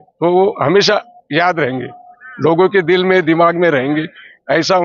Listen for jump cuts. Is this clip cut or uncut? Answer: uncut